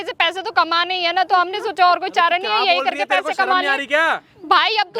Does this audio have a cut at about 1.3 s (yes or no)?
no